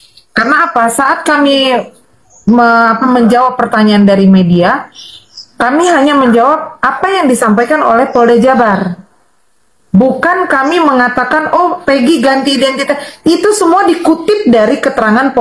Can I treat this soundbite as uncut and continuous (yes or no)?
yes